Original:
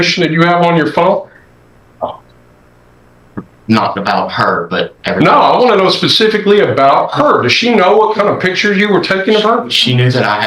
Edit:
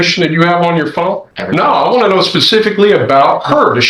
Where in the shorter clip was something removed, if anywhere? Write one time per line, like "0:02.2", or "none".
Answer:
0:01.3